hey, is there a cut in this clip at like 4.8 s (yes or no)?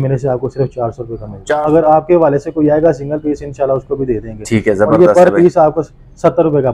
no